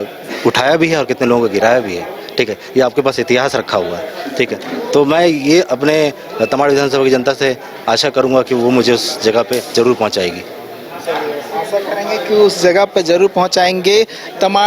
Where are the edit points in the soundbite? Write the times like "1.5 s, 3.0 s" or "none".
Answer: none